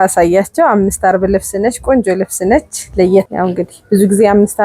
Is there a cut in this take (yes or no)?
yes